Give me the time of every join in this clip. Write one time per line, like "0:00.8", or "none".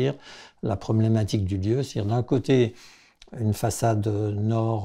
none